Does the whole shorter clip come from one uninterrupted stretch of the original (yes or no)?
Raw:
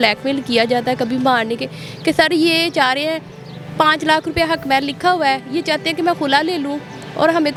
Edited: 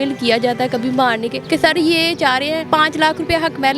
no